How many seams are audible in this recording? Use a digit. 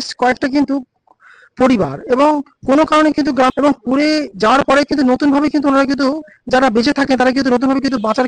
1